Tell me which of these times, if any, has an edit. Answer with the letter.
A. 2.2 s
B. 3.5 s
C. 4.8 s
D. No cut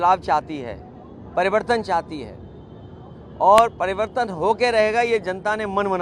D